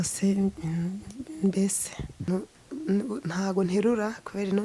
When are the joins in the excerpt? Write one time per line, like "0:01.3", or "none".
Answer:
0:02.3